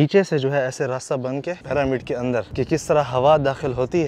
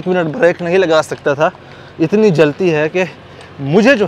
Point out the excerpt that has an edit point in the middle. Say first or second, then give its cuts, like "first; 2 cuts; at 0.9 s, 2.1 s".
first; 2 cuts; at 1.6 s, 2.5 s